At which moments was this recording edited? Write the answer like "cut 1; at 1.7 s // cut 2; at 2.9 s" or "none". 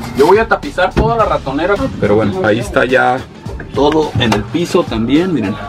cut 1; at 1.8 s